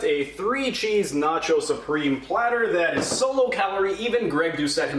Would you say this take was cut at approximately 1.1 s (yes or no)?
no